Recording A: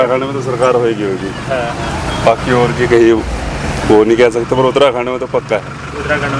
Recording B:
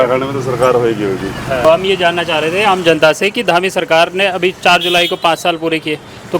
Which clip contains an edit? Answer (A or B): B